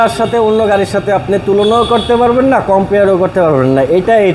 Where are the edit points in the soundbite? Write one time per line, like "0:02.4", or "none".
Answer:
none